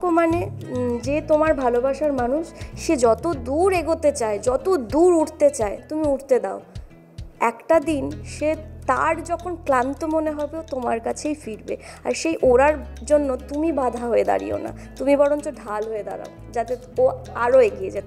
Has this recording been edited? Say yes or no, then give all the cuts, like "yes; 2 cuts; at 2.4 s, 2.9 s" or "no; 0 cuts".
no; 0 cuts